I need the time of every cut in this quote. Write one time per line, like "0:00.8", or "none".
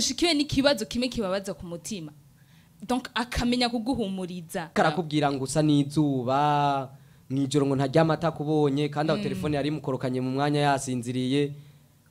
0:04.7

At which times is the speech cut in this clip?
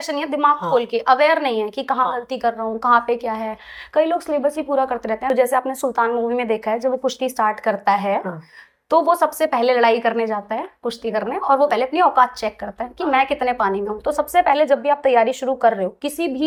none

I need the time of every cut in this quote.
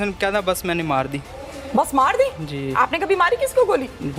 none

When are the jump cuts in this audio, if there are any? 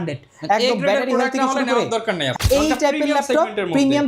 0:02.3

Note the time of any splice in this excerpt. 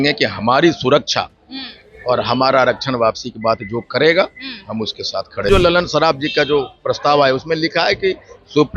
0:05.5

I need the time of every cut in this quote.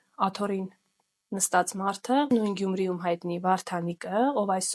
0:02.3

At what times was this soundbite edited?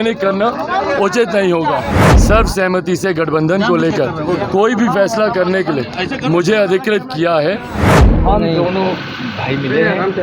0:02.0
0:07.8

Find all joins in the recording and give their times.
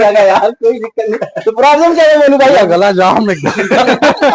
none

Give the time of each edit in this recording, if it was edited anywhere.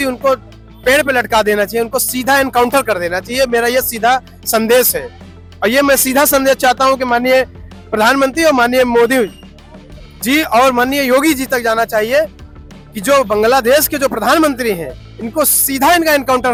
none

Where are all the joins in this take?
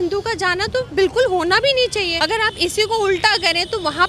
0:02.1

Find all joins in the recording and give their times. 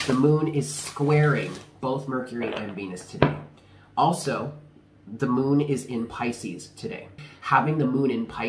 0:07.2

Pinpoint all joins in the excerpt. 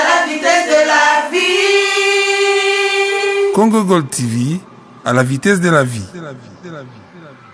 none

